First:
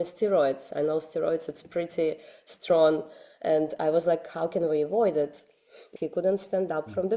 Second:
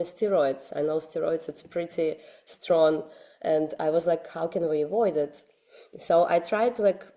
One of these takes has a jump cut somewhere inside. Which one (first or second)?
first